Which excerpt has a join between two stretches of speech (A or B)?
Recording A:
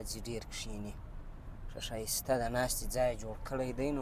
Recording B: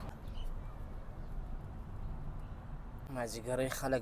B